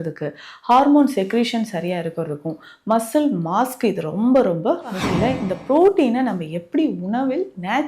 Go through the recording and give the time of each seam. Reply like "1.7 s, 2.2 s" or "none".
5.0 s